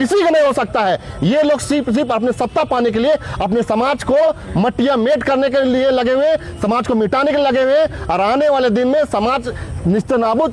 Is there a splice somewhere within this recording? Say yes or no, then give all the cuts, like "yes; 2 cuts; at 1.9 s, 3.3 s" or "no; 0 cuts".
no; 0 cuts